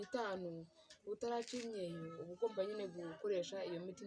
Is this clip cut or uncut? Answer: uncut